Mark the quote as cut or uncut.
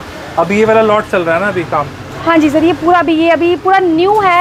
uncut